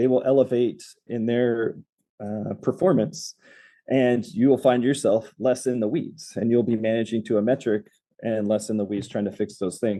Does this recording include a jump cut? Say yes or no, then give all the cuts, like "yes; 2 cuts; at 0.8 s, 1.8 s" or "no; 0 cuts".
no; 0 cuts